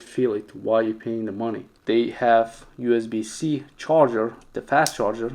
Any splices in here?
yes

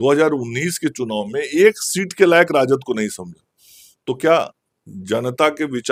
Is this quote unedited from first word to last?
yes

